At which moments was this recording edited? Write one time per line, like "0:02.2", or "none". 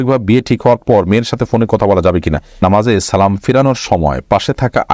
0:02.6